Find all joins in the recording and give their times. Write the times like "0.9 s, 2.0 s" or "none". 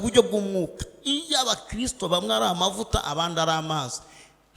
none